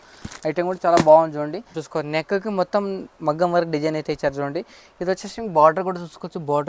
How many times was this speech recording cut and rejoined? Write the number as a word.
one